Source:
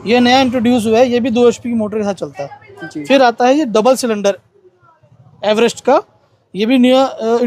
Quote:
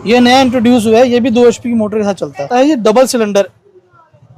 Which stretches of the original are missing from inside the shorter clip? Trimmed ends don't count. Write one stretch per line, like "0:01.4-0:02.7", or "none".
0:02.5-0:03.4